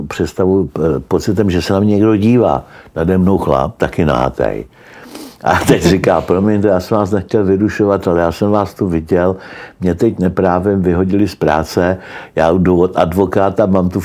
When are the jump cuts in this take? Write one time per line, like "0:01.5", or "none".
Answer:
none